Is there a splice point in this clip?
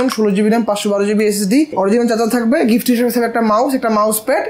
yes; 1 cut; at 1.7 s

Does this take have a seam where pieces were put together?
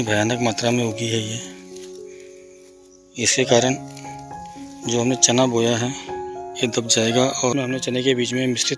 yes; 1 cut; at 7.5 s

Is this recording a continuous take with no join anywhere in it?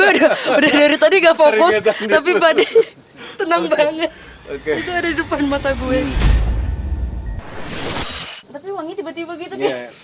no; 2 cuts; at 6.2 s, 8.3 s

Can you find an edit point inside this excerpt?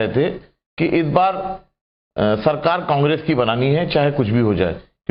no; 0 cuts

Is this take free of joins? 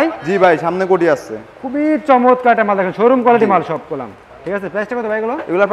yes; 0 cuts

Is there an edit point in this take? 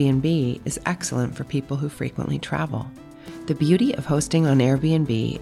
no; 0 cuts

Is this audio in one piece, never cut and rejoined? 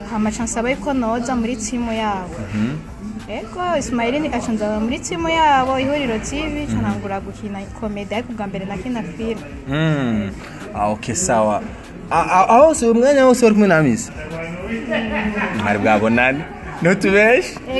yes; 0 cuts

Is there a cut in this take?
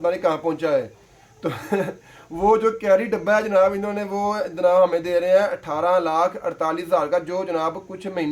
no; 0 cuts

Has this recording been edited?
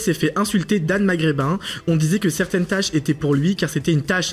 no; 0 cuts

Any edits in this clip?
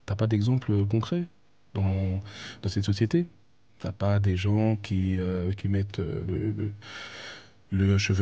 no; 0 cuts

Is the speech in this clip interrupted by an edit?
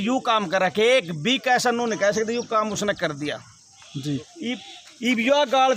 no; 0 cuts

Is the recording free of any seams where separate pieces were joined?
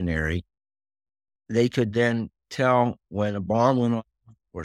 yes; 0 cuts

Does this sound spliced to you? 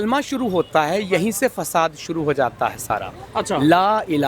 no; 0 cuts

